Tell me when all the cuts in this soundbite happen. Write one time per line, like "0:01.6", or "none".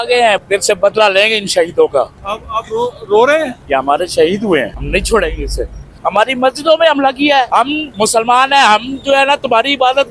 0:03.6
0:04.8
0:05.9
0:07.6